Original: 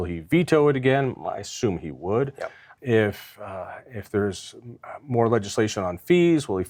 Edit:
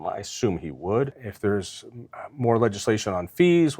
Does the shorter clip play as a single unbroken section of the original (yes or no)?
no